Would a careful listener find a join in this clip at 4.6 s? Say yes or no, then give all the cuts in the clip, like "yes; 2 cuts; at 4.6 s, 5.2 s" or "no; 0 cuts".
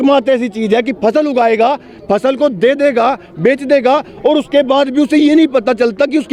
no; 0 cuts